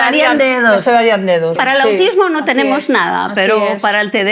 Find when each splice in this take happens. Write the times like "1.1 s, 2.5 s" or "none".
1.6 s